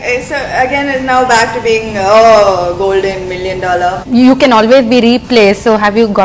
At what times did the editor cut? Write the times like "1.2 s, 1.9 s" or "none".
4.0 s